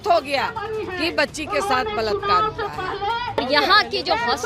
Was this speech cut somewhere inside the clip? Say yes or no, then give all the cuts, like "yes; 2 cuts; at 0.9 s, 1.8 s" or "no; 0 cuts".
yes; 1 cut; at 3.4 s